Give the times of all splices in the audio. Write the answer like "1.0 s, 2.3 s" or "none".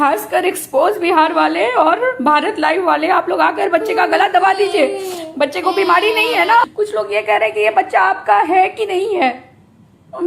6.7 s